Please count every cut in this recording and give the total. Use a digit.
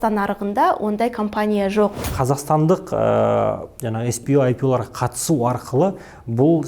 1